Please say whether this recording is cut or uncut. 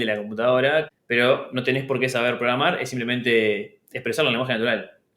cut